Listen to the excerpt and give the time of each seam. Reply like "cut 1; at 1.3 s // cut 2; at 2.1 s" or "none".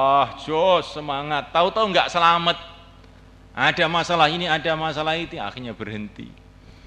none

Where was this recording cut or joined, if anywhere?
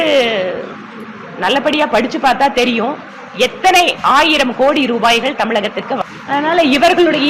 cut 1; at 6.0 s

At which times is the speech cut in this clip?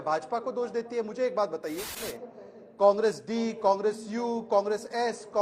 cut 1; at 2.0 s

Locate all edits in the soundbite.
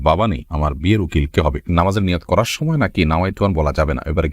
cut 1; at 1.7 s

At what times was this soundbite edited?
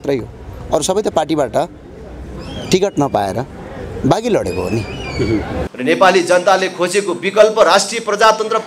cut 1; at 5.7 s

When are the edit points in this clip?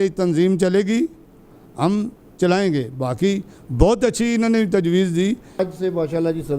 cut 1; at 5.6 s

